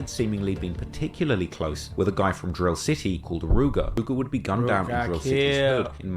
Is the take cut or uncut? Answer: cut